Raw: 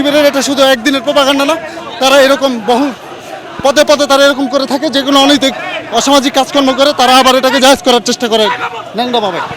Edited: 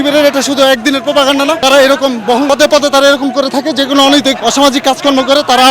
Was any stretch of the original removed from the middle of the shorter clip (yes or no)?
yes